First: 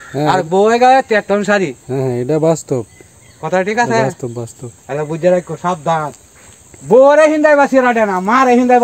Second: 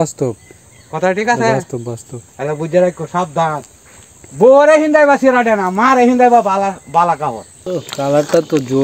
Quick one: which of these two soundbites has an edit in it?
second; 1 cut; at 7.5 s

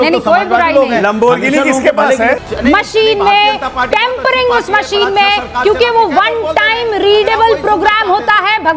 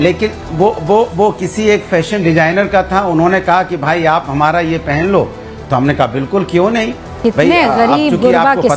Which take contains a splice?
first; 1 cut; at 2.4 s

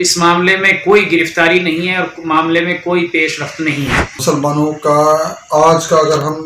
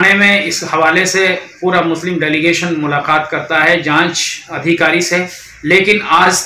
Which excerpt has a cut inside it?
first; 1 cut; at 4.1 s

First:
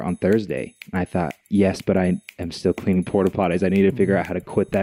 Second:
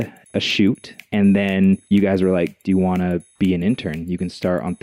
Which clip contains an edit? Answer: second; 1 cut; at 1.8 s

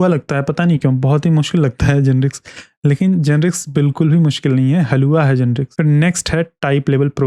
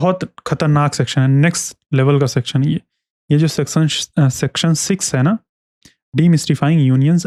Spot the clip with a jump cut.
first; 1 cut; at 5.7 s

